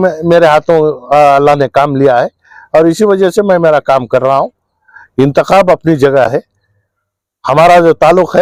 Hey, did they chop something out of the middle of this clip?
no; 0 cuts

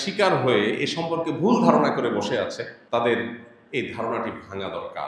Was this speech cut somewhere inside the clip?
yes; 1 cut; at 2.7 s

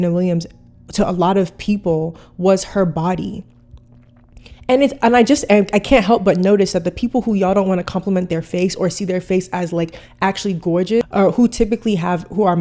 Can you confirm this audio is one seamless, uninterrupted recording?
no; 1 cut; at 11.1 s

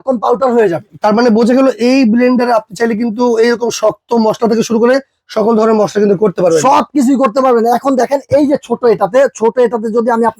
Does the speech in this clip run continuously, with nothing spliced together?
yes; 0 cuts

